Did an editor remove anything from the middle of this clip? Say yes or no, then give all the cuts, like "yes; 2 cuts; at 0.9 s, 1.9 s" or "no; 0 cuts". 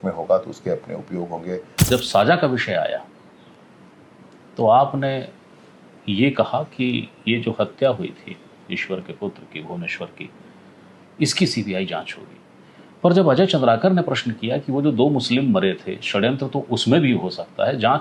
yes; 1 cut; at 1.8 s